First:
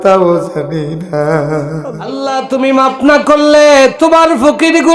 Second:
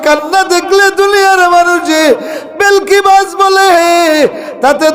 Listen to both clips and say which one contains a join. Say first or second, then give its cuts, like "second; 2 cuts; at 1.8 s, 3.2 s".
first; 1 cut; at 2.2 s